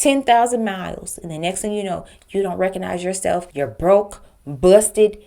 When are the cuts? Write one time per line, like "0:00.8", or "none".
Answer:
0:03.5